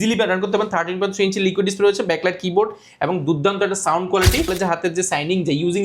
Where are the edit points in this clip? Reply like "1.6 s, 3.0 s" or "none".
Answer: 4.5 s